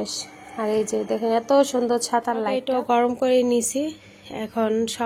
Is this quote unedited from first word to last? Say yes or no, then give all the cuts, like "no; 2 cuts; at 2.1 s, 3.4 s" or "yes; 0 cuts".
no; 1 cut; at 2.6 s